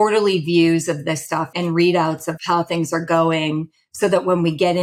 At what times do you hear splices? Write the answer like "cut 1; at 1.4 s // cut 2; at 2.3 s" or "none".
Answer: cut 1; at 1.5 s // cut 2; at 2.4 s